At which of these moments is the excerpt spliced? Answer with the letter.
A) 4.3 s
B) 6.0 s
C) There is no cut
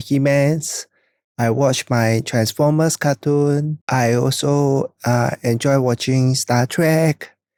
C